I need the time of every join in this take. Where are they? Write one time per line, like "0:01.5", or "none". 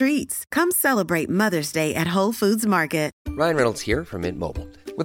0:03.2